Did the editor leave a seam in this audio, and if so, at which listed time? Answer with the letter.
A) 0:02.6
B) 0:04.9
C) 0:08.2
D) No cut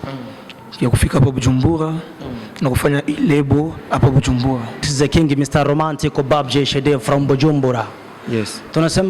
B